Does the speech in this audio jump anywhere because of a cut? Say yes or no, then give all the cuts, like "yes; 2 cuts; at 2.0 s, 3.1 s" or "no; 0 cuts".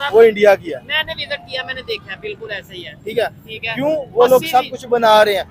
no; 0 cuts